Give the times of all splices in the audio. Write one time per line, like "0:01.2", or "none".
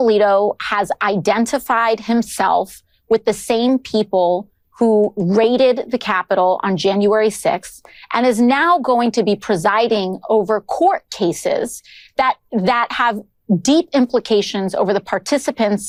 none